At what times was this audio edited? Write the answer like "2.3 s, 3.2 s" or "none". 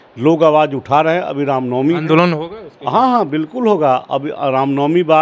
none